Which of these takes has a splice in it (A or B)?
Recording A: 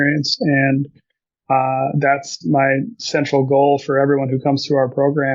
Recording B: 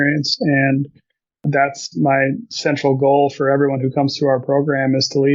B